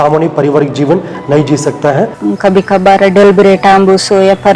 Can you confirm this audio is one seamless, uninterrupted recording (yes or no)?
no